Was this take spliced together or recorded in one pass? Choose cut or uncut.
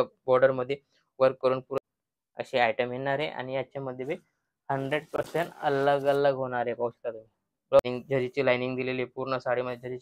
cut